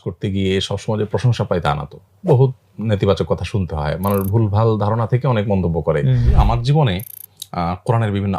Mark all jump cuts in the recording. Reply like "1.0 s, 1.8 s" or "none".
6.3 s